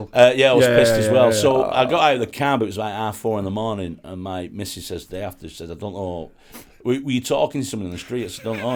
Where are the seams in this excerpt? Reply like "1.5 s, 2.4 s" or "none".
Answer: none